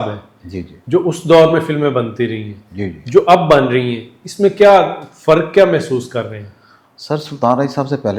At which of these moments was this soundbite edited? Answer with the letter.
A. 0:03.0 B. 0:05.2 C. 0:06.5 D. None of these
D